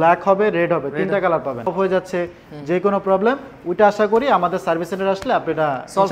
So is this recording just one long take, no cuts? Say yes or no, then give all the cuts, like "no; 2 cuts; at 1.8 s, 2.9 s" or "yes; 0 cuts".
no; 1 cut; at 1.7 s